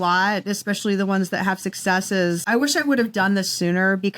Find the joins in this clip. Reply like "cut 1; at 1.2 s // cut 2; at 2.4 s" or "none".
cut 1; at 2.4 s